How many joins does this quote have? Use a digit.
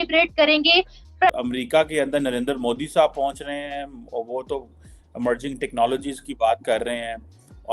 1